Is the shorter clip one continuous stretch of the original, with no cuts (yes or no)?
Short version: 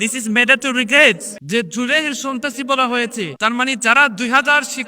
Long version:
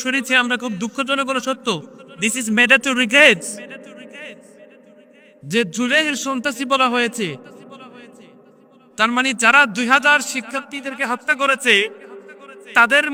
no